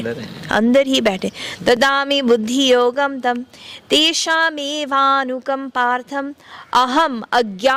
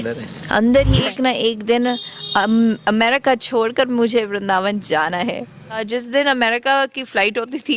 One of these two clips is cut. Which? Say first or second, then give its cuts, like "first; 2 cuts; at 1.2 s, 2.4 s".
second; 2 cuts; at 1.0 s, 5.8 s